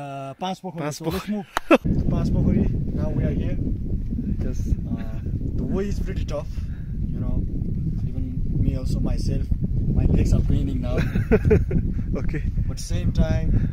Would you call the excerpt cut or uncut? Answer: cut